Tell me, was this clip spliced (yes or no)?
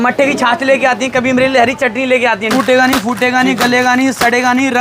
yes